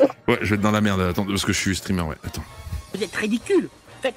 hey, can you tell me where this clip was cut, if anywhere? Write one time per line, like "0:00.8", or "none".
0:02.8